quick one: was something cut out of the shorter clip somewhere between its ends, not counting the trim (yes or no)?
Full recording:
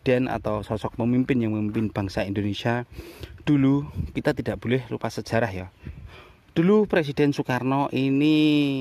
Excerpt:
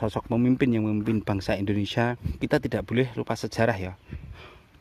yes